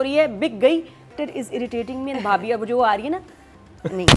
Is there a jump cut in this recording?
yes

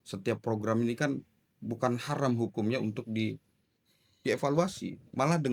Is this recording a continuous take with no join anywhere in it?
yes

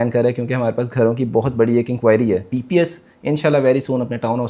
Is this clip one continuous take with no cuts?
no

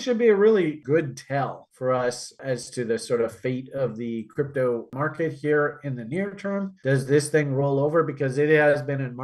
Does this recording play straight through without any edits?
no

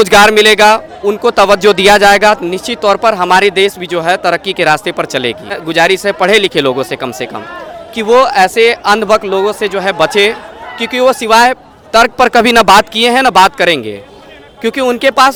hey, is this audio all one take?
yes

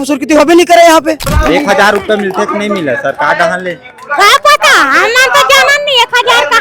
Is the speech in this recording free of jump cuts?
no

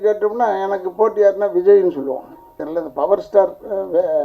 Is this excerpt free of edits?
no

